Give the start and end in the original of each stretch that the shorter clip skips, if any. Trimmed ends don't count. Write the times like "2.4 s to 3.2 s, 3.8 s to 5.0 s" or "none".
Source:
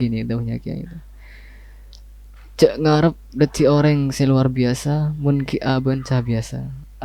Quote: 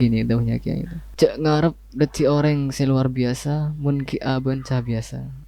1.0 s to 2.4 s